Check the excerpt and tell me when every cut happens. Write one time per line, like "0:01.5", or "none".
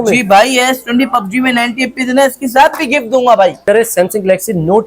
0:03.6